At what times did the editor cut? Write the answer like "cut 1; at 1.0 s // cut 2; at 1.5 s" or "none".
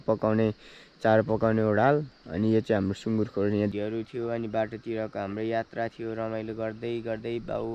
cut 1; at 3.7 s